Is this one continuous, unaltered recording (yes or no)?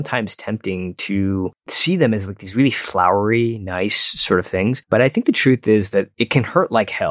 no